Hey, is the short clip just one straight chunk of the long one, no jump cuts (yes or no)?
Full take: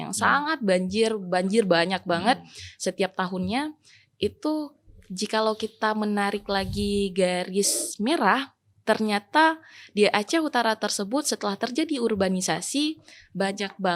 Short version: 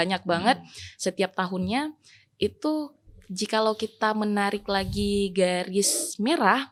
yes